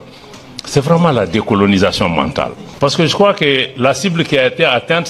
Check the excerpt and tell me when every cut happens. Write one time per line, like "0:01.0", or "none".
0:02.6